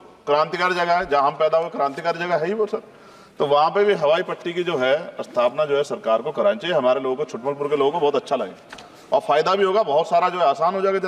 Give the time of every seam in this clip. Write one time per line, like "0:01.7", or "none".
none